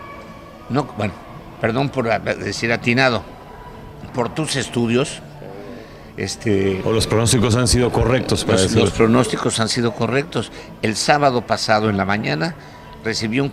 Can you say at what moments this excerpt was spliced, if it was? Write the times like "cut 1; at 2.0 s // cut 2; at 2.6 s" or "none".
none